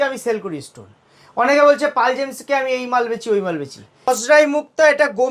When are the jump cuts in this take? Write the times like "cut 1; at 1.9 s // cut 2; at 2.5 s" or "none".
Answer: cut 1; at 3.9 s